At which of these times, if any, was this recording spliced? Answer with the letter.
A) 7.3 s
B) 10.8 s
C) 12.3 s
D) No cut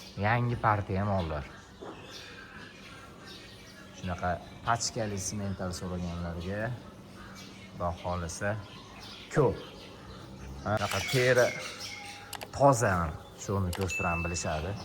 B